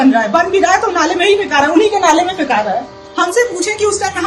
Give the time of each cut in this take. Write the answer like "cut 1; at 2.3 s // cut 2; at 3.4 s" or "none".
cut 1; at 3.0 s

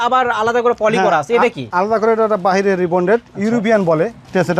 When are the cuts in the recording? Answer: none

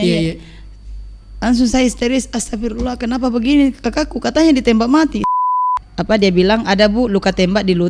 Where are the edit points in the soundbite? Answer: cut 1; at 5.4 s

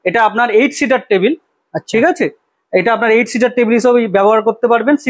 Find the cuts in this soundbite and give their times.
none

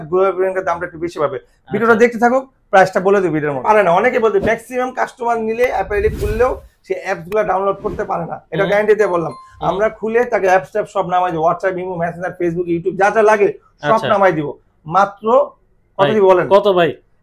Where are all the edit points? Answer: cut 1; at 3.6 s

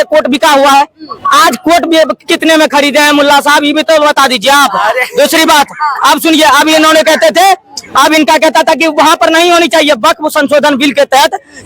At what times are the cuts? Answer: none

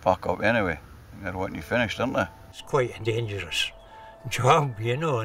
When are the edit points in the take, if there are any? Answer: cut 1; at 2.5 s

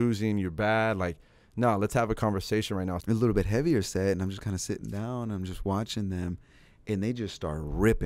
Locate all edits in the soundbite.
cut 1; at 3.0 s

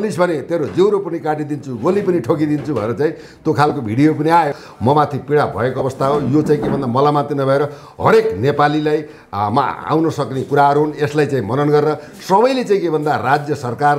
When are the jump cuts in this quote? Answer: cut 1; at 4.7 s

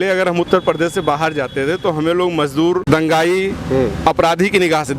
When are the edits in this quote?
cut 1; at 2.8 s

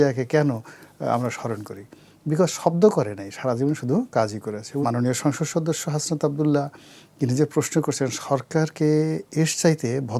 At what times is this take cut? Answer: cut 1; at 4.7 s

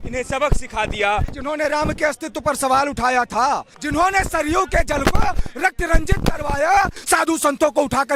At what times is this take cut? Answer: cut 1; at 1.3 s // cut 2; at 3.7 s // cut 3; at 7.0 s

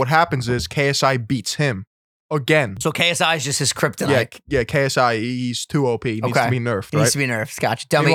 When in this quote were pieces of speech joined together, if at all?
cut 1; at 2.7 s

